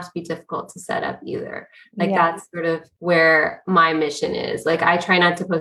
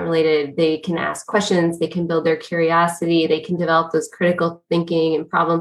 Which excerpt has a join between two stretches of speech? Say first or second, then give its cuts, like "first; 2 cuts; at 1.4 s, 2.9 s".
first; 1 cut; at 2.9 s